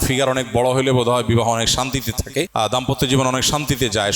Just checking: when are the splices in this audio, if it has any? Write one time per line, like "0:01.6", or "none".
0:02.5